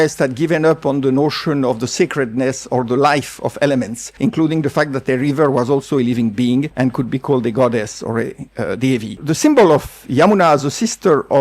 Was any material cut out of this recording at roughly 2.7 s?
no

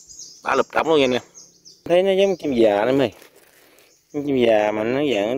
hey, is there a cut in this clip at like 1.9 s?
yes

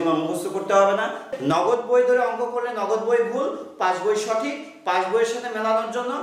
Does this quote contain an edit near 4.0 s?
no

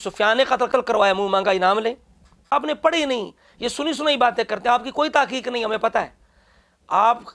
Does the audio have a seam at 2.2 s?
no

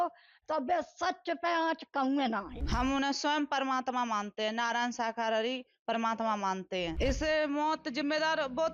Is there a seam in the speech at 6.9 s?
yes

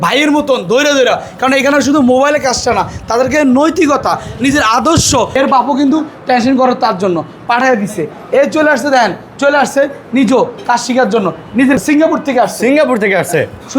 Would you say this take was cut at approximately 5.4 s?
yes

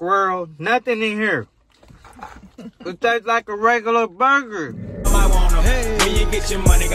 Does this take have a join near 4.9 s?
yes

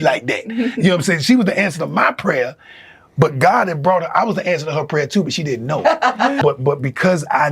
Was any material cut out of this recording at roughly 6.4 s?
yes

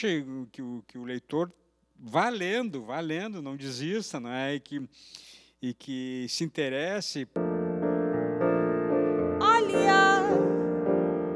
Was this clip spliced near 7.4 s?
yes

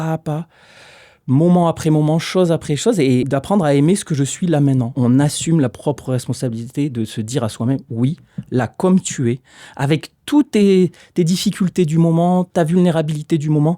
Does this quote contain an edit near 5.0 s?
yes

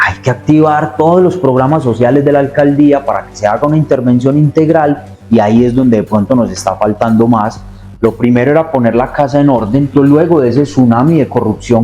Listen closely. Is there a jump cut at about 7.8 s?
yes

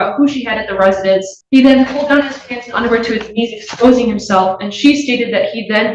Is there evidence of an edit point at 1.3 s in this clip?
yes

